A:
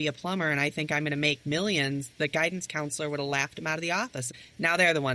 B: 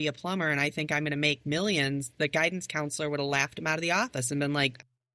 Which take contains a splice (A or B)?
A